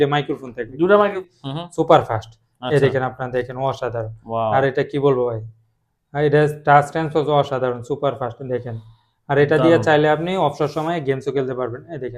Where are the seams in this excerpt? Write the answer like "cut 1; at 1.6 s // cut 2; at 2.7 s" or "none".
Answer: cut 1; at 1.2 s